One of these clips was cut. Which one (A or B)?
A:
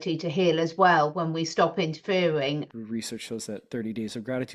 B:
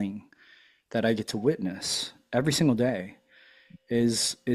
A